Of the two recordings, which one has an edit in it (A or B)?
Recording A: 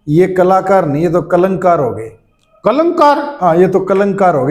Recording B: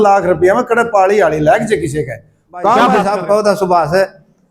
B